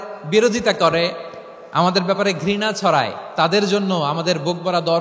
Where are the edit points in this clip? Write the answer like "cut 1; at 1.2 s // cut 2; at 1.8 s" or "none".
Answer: none

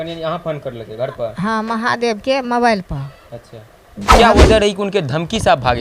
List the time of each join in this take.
cut 1; at 4.2 s

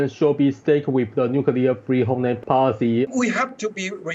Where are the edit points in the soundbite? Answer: cut 1; at 2.4 s // cut 2; at 3.1 s

